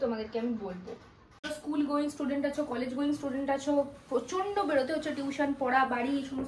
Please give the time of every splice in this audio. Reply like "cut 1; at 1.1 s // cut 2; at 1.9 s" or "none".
cut 1; at 1.5 s